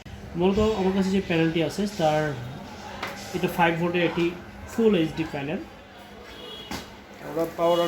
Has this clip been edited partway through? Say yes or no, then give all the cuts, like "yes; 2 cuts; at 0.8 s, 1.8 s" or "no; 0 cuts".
yes; 1 cut; at 5.7 s